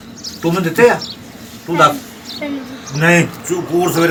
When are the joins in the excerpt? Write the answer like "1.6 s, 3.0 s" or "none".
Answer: none